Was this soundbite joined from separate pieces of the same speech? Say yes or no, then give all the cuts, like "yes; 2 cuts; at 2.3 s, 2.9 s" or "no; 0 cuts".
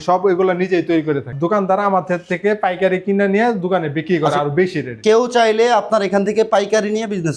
yes; 1 cut; at 1.3 s